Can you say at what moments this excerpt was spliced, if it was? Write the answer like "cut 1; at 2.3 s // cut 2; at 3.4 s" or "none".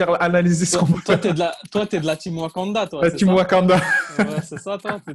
none